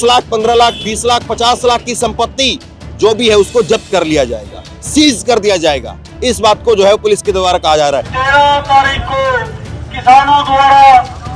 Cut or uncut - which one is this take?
cut